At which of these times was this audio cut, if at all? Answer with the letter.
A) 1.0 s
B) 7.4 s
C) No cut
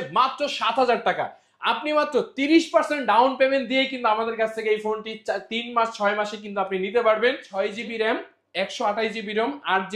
B